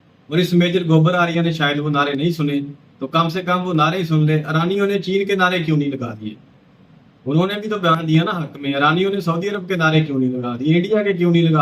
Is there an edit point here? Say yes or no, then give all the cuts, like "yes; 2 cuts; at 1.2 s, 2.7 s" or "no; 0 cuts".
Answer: no; 0 cuts